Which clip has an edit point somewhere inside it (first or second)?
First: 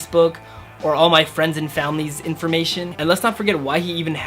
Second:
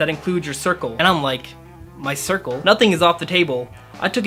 first